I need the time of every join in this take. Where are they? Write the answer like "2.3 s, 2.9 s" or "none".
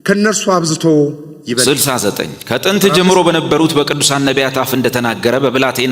1.6 s